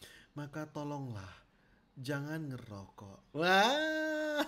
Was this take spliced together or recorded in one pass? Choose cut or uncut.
cut